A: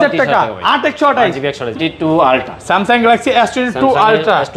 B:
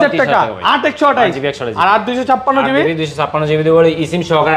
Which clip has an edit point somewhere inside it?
A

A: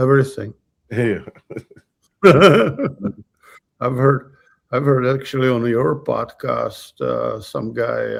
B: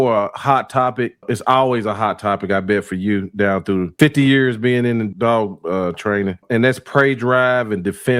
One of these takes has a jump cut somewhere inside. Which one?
B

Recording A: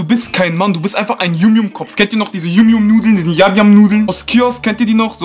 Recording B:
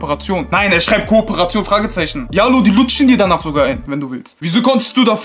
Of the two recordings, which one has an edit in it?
B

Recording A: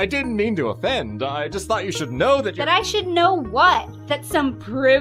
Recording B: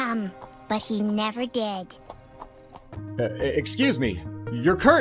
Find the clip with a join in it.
B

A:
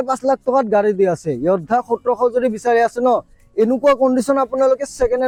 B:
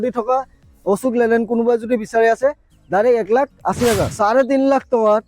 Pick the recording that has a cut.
B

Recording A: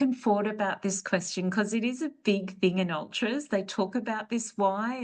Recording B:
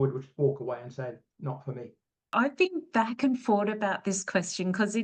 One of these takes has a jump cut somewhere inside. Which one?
B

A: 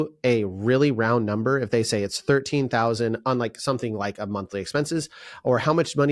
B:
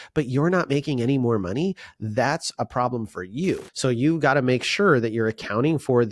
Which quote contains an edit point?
B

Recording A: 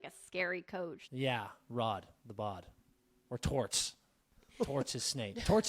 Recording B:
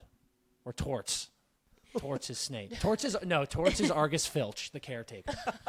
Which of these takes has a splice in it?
A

